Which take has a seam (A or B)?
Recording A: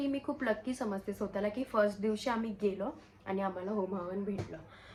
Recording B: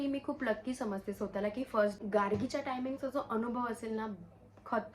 B